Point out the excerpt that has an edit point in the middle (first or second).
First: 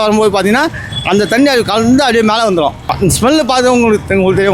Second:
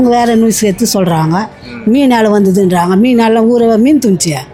first